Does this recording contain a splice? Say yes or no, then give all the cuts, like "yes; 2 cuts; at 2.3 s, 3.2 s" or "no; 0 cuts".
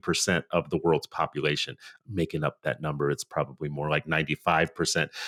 no; 0 cuts